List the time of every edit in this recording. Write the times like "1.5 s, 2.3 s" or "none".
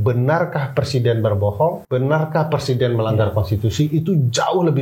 1.8 s